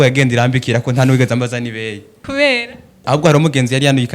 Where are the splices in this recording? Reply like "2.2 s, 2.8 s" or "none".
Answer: 2.1 s, 3.0 s